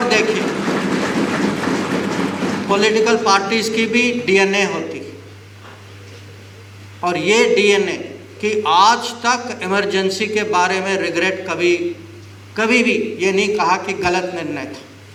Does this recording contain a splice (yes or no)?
no